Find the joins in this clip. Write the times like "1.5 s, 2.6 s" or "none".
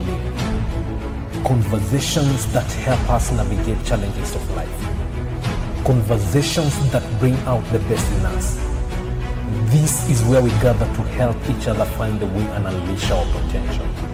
none